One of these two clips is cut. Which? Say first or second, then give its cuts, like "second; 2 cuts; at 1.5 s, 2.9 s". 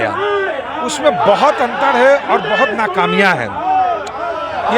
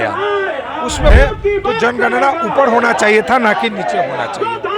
second; 1 cut; at 1.1 s